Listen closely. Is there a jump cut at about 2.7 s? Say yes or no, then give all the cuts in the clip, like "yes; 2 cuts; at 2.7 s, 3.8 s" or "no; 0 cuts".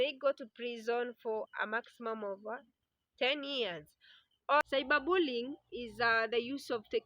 no; 1 cut; at 4.6 s